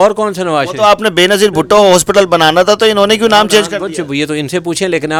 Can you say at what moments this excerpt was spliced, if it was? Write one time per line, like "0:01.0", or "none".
none